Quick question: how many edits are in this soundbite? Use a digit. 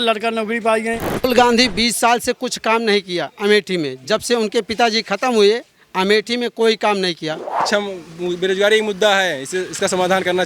2